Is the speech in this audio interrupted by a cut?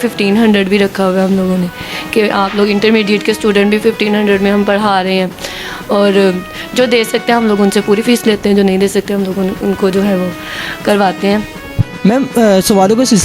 no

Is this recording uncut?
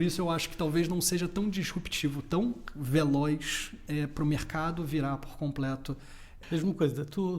no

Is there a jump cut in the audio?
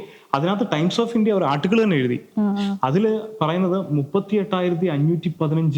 no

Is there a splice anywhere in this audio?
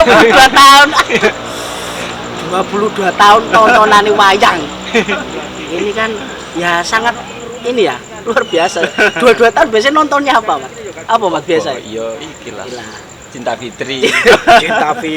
no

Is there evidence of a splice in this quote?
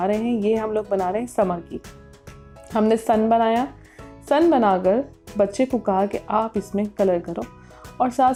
no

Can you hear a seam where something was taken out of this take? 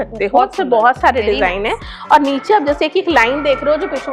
no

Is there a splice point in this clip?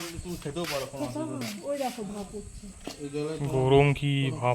no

